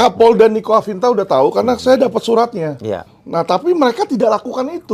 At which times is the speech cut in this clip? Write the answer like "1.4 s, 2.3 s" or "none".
3.1 s

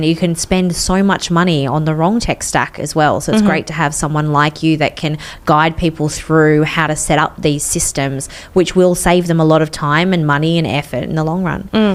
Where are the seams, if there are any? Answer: none

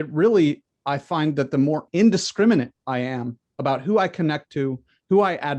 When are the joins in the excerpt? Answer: none

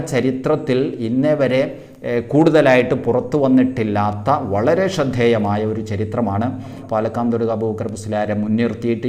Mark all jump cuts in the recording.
6.8 s

